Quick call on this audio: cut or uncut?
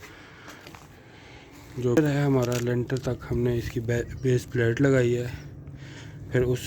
cut